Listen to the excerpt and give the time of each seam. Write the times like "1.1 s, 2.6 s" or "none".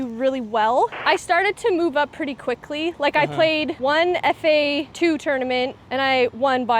1.0 s, 3.7 s, 4.9 s, 5.8 s